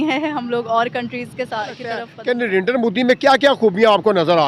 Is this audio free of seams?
no; 1 cut; at 2.1 s

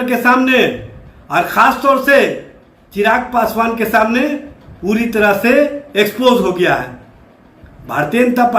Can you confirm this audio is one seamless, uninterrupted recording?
yes; 0 cuts

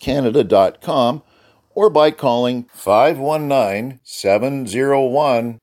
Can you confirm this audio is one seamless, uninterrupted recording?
yes; 0 cuts

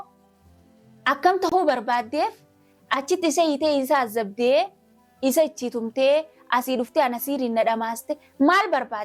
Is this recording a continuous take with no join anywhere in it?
yes; 0 cuts

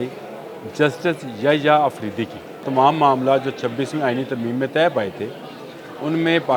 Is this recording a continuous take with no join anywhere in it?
no; 1 cut; at 2.6 s

